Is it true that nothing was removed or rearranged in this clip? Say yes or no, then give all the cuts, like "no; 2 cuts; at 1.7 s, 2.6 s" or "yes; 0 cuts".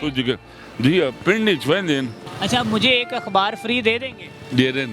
no; 1 cut; at 2.3 s